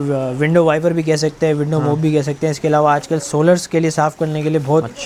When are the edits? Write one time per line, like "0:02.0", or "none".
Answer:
none